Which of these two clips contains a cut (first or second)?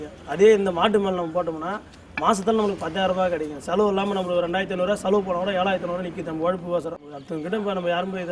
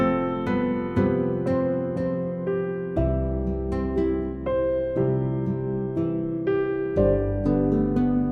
first